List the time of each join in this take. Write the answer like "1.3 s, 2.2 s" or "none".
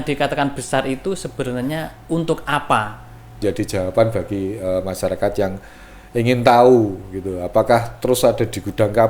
3.4 s